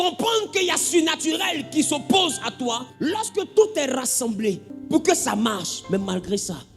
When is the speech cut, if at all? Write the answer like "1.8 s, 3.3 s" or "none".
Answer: 2.9 s, 4.7 s